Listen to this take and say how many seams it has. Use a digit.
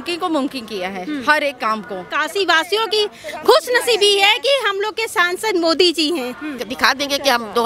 2